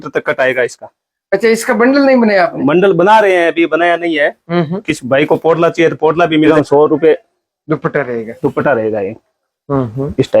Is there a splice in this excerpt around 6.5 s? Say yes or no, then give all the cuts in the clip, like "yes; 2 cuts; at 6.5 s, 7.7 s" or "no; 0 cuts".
yes; 1 cut; at 6.5 s